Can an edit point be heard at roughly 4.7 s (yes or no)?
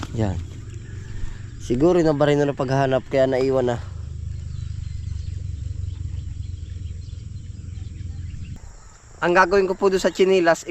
no